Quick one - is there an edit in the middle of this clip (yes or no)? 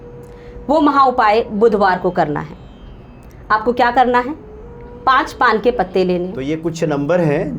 yes